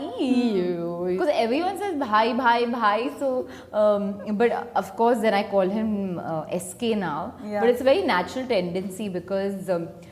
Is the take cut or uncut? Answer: cut